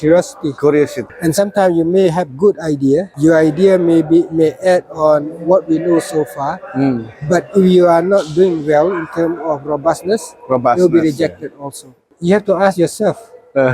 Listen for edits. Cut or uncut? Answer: cut